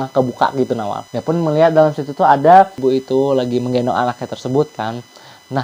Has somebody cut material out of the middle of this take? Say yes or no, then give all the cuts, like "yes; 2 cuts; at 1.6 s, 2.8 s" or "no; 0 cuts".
yes; 1 cut; at 2.7 s